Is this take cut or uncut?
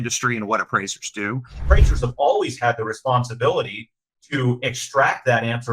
cut